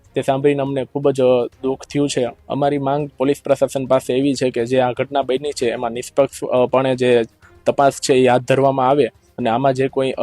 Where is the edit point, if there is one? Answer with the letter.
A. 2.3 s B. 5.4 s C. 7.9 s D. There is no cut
D